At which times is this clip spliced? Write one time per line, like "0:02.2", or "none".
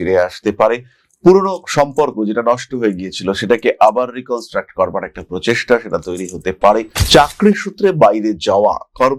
none